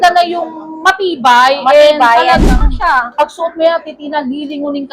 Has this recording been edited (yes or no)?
yes